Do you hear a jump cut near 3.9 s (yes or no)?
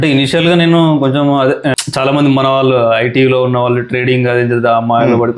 no